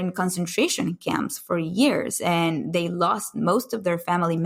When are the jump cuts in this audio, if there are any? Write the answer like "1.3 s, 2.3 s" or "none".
none